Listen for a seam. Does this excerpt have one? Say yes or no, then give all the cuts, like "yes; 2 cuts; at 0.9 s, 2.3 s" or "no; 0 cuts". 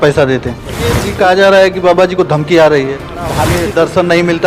yes; 2 cuts; at 1.0 s, 3.5 s